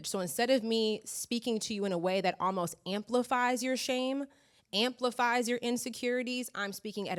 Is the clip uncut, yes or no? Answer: yes